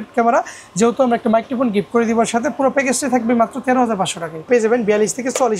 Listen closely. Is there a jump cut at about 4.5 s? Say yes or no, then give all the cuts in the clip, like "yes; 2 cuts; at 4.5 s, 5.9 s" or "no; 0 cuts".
yes; 1 cut; at 4.5 s